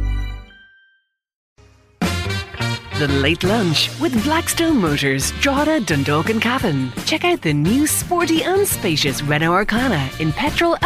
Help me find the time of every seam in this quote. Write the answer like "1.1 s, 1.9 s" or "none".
1.5 s